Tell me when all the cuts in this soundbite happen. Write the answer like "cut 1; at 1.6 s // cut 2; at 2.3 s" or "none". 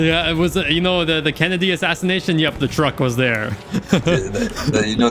none